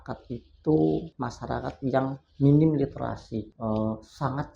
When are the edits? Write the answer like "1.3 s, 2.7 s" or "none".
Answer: 1.2 s, 3.5 s